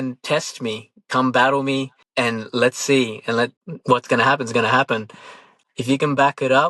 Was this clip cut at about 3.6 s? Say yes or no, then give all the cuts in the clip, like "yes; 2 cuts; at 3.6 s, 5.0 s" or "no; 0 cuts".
yes; 3 cuts; at 2.0 s, 3.6 s, 5.5 s